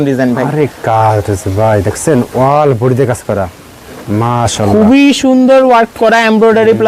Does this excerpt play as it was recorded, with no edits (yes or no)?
yes